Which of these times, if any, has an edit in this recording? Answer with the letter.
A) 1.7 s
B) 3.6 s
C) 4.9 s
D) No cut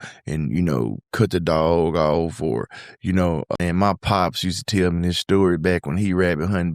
B